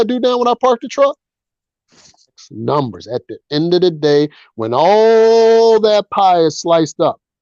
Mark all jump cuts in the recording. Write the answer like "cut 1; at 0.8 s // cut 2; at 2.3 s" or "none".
cut 1; at 2.5 s